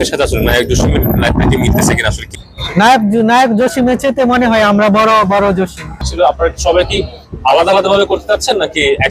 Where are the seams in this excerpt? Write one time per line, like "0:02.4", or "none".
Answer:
0:02.3
0:06.0